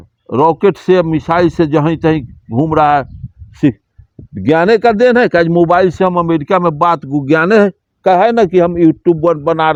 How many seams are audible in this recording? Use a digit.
0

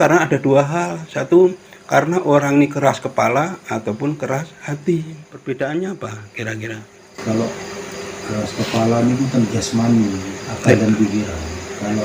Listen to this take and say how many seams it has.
1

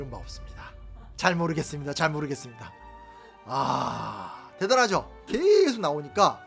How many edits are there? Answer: 1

